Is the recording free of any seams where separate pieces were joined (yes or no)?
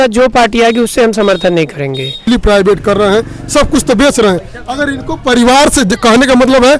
no